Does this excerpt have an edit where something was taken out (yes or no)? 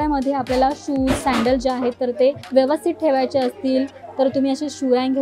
yes